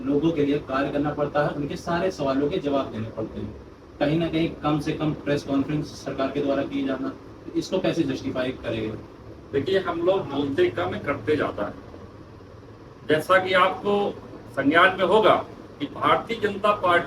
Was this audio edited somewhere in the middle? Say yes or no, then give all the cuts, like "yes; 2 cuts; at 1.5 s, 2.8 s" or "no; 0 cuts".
no; 0 cuts